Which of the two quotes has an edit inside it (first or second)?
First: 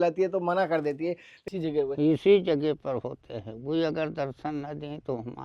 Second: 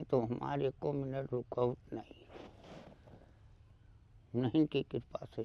first